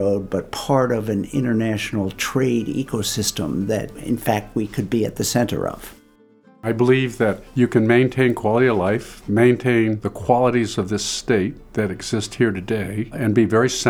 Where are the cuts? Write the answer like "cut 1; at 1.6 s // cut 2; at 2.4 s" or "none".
cut 1; at 3.9 s // cut 2; at 6.6 s // cut 3; at 7.4 s // cut 4; at 9.2 s // cut 5; at 10.1 s // cut 6; at 11.6 s // cut 7; at 13.1 s